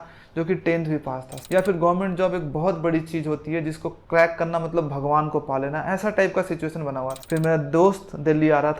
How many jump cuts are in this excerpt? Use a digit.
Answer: 2